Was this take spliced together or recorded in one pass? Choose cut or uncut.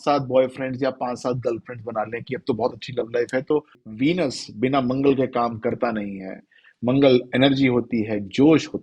cut